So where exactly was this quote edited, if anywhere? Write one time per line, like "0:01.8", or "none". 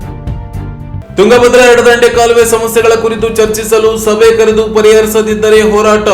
0:01.0